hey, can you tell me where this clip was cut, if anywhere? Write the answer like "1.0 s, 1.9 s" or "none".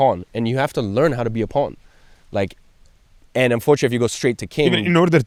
none